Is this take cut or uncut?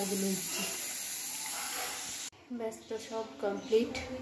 cut